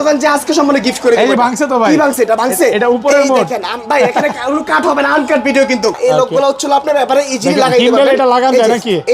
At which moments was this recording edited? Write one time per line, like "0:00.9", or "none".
0:06.0